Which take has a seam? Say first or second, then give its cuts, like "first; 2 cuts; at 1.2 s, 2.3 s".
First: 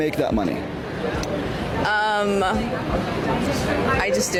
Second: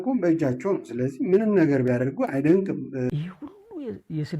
second; 1 cut; at 3.1 s